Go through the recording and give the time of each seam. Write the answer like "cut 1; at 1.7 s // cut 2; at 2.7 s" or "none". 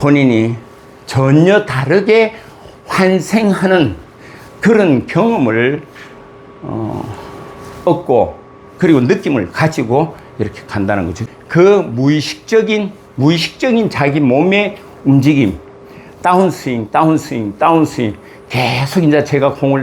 cut 1; at 11.2 s